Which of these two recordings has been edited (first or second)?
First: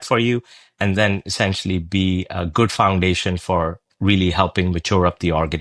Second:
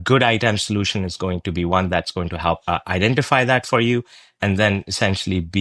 second